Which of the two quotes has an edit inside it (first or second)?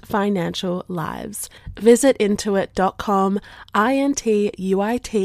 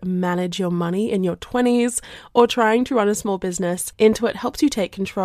second